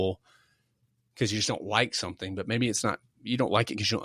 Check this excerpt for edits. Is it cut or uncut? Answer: uncut